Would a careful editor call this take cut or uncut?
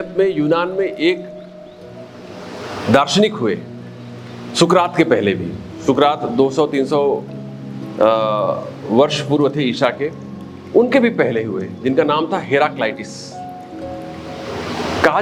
uncut